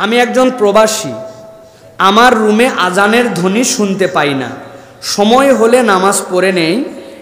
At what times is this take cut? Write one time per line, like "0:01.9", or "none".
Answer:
none

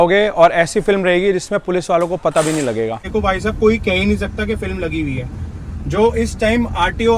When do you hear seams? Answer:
0:03.1

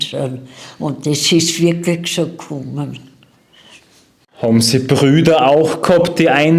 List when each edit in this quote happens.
0:04.2

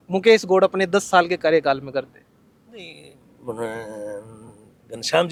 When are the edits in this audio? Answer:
none

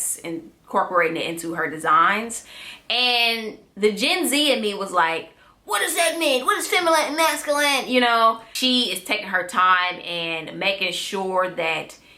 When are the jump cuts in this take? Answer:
0:08.5

